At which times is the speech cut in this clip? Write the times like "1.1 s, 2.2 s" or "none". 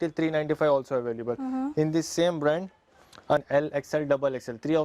3.4 s